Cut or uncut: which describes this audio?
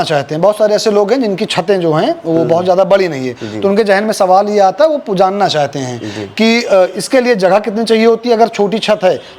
uncut